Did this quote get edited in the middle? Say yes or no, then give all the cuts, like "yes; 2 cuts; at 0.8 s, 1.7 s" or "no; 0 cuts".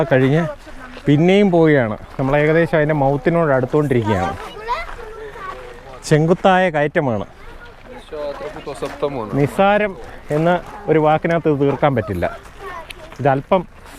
no; 0 cuts